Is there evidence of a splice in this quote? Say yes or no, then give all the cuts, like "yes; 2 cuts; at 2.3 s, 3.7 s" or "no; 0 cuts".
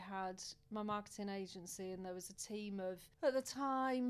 no; 0 cuts